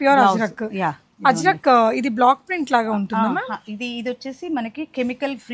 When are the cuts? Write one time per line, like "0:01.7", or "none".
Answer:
none